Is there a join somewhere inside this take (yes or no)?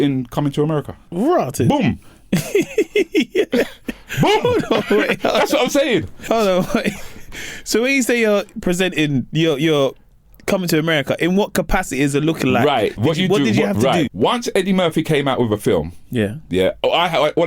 yes